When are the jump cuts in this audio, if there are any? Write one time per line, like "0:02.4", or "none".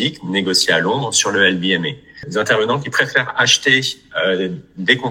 0:02.3